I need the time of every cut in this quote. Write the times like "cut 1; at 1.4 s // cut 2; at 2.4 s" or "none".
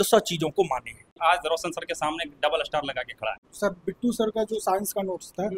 cut 1; at 1.1 s // cut 2; at 3.5 s